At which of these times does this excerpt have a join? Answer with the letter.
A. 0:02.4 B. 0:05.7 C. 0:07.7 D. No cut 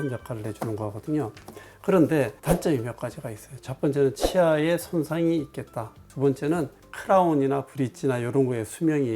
A